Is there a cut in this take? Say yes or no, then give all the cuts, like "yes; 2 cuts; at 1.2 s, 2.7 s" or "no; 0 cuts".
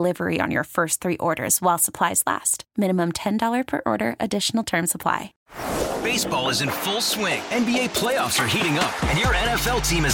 yes; 1 cut; at 5.3 s